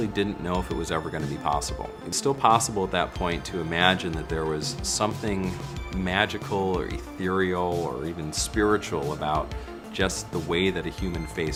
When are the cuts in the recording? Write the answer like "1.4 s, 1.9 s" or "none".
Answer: none